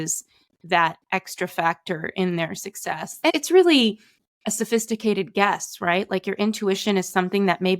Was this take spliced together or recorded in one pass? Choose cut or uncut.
cut